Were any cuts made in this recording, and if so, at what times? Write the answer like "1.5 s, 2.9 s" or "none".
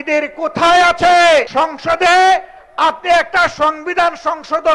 1.5 s